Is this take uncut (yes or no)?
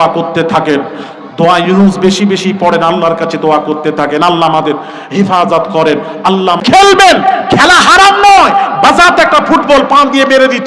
no